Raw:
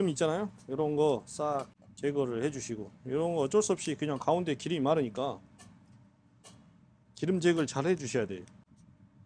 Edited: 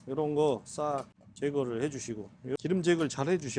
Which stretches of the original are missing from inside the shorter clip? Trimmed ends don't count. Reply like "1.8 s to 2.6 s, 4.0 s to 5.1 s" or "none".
3.2 s to 7.1 s